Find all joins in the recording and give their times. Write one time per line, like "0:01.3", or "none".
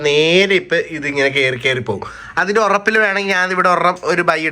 none